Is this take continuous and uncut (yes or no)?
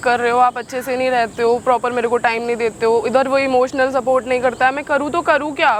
yes